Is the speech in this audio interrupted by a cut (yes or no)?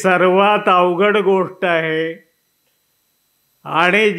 no